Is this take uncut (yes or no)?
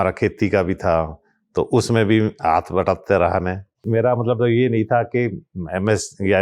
no